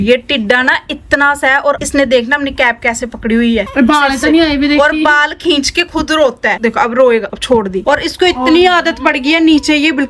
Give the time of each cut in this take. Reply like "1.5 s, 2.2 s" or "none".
none